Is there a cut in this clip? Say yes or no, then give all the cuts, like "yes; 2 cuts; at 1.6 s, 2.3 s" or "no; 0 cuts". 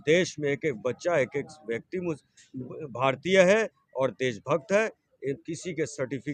no; 0 cuts